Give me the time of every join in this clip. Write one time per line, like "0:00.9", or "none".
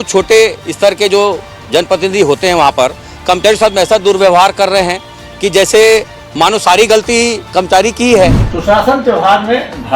0:08.5